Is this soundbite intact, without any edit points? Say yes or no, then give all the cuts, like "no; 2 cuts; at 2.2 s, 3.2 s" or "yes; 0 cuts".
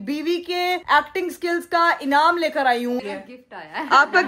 no; 1 cut; at 3.0 s